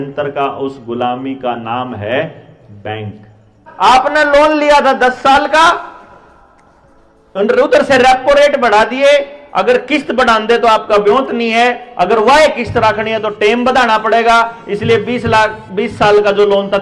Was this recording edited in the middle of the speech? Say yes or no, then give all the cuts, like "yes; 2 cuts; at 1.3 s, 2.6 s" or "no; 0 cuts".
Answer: yes; 1 cut; at 3.6 s